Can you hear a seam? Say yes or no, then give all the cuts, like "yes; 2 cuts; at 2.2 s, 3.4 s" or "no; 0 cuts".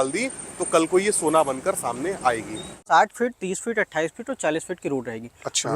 yes; 1 cut; at 2.8 s